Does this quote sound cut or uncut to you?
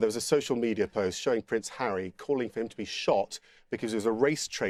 uncut